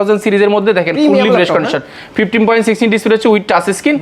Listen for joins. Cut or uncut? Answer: uncut